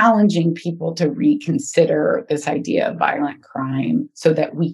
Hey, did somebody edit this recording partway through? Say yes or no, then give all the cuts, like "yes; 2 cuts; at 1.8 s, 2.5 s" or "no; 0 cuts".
no; 0 cuts